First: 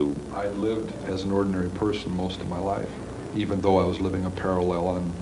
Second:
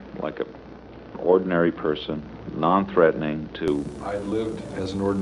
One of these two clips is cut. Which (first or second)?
first